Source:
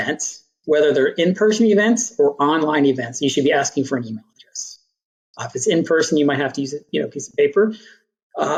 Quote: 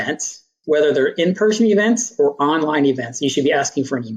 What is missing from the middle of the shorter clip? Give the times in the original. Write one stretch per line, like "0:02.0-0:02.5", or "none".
none

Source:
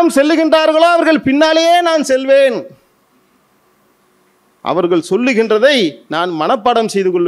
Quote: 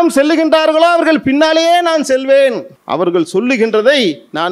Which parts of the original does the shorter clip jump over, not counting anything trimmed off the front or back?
0:02.7-0:04.5

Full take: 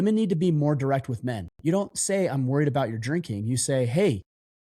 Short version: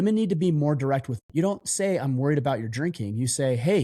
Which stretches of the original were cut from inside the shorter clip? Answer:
0:01.2-0:01.5

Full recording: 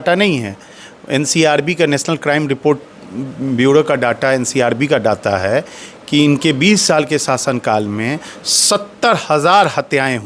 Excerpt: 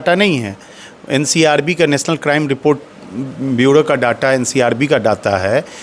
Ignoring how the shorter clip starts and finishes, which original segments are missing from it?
none

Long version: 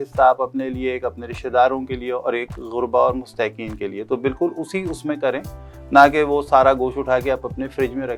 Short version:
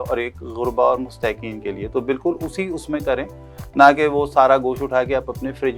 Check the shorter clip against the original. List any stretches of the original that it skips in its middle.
none

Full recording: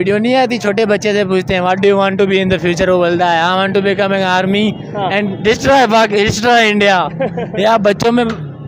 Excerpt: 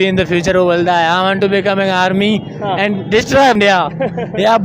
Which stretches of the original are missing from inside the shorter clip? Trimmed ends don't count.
0:05.9-0:06.8

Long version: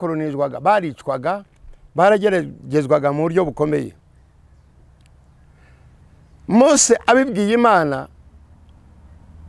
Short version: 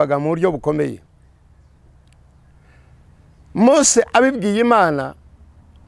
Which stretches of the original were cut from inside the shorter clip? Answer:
none

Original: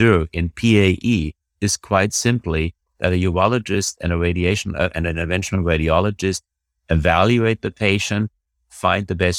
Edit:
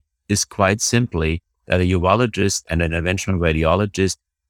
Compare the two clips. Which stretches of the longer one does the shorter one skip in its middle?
0:04.0-0:04.9

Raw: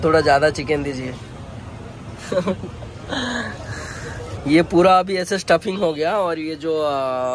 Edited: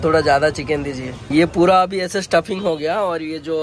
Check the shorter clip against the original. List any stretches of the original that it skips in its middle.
0:01.1-0:04.3

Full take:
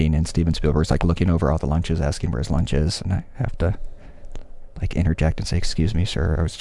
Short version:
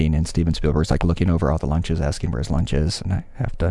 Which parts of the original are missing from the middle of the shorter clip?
none

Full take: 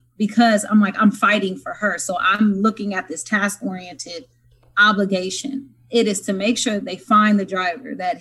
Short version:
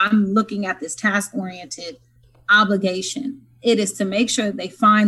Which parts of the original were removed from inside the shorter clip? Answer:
none

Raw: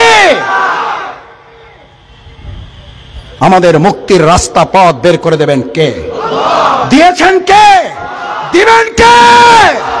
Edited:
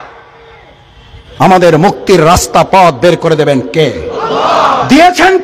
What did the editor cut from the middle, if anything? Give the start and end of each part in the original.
0:02.3-0:03.1

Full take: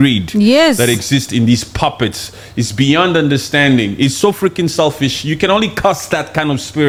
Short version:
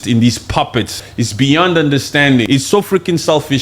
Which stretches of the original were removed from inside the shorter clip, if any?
0:02.3-0:02.4
0:03.8-0:04.0

